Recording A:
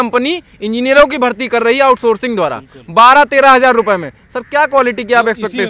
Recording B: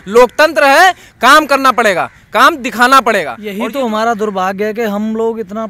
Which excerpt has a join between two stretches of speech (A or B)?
B